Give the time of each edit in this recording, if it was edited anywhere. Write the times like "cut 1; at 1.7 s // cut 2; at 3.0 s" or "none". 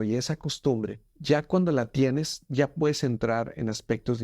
cut 1; at 1.1 s